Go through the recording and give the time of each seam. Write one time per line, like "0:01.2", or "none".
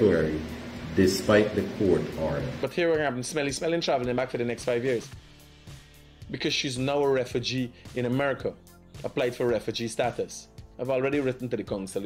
0:02.5